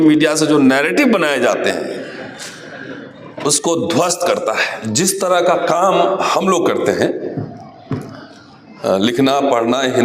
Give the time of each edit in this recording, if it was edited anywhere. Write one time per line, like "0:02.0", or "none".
0:04.7